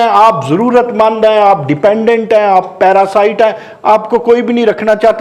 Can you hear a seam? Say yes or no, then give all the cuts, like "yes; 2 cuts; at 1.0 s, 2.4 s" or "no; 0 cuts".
no; 0 cuts